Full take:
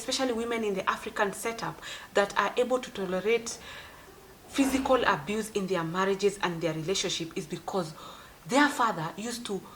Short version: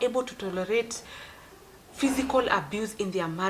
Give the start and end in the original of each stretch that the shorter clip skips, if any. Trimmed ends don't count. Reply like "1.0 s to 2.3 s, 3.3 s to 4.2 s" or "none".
none